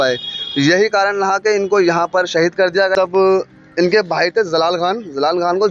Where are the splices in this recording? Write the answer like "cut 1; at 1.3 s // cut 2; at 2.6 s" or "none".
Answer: cut 1; at 2.9 s